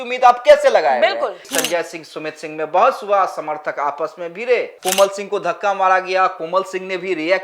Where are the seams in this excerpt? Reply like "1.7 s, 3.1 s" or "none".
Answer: 1.5 s, 4.7 s